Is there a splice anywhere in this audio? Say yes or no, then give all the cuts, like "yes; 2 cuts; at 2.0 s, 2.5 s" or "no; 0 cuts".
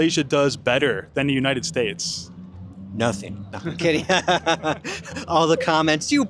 no; 0 cuts